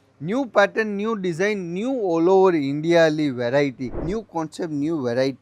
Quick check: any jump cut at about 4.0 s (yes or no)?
yes